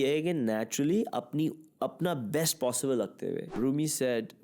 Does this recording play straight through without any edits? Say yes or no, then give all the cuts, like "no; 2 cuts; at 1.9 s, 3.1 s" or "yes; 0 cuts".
no; 1 cut; at 3.5 s